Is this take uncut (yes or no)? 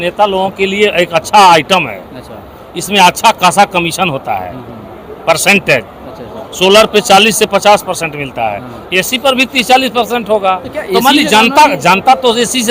yes